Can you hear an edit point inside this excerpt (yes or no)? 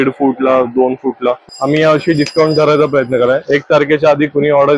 yes